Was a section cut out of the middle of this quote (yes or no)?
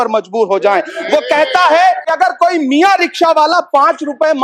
yes